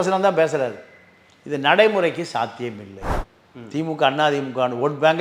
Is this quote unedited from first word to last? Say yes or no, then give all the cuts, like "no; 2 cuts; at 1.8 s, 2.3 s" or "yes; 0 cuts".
no; 1 cut; at 2.9 s